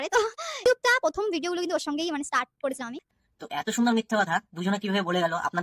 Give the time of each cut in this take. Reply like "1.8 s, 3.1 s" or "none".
3.0 s